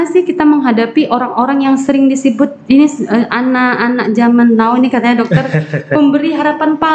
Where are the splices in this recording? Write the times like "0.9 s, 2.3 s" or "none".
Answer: none